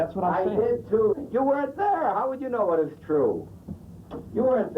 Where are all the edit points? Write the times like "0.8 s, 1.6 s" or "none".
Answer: 1.2 s